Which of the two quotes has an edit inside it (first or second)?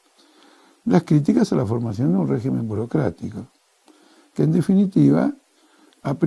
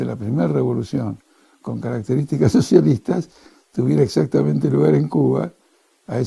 second